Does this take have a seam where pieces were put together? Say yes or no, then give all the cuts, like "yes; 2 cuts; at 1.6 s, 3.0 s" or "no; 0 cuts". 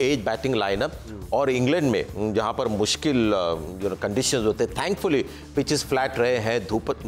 no; 0 cuts